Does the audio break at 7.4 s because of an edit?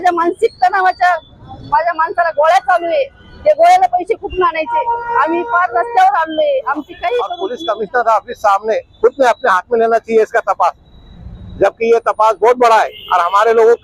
yes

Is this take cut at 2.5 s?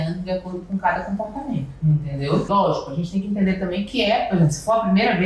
yes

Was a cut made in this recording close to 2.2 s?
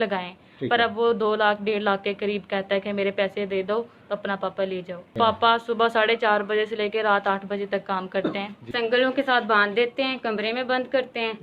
no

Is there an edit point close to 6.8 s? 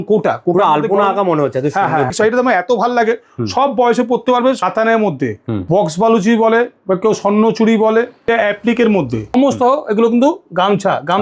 no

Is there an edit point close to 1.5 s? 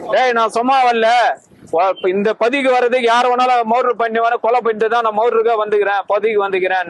no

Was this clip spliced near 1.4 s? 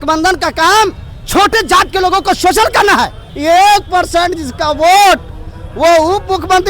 no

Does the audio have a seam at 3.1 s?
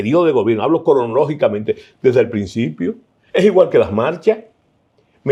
no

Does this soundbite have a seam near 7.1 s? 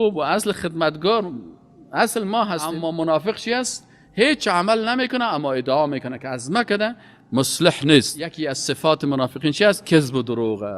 no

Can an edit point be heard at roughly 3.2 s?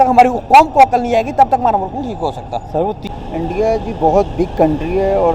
yes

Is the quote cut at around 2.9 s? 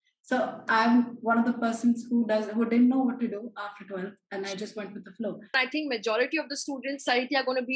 no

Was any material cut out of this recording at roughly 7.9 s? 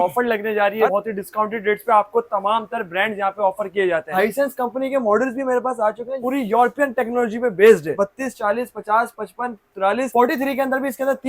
yes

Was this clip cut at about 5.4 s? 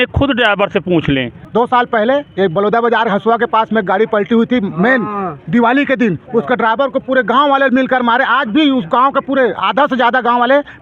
no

